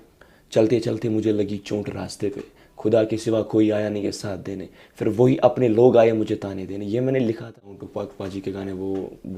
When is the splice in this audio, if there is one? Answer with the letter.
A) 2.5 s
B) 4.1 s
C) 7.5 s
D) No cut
C